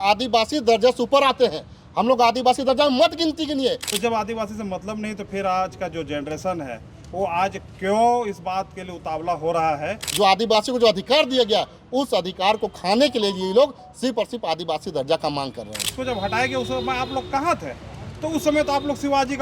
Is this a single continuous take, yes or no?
no